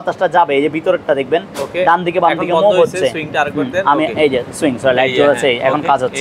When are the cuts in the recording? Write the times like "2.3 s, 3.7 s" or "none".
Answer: none